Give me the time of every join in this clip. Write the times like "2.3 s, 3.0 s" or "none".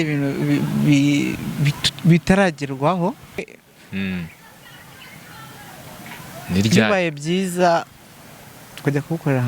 3.4 s